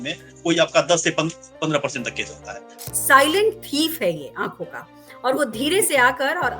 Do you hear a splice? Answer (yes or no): yes